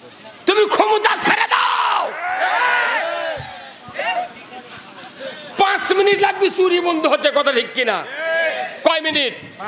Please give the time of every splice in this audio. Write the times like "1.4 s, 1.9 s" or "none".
none